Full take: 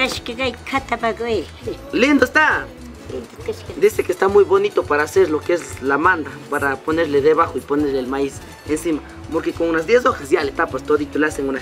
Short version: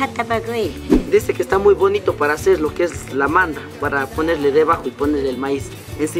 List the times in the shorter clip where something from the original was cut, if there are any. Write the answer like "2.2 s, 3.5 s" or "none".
1.0 s